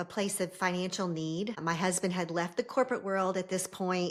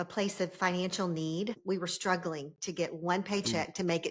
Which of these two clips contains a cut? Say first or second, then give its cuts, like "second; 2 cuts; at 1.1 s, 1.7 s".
second; 1 cut; at 1.6 s